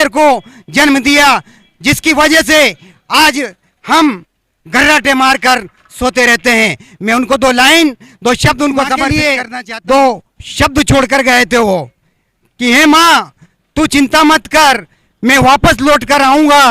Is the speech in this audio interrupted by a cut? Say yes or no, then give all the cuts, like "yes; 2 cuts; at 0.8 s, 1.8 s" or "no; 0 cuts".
yes; 1 cut; at 9.1 s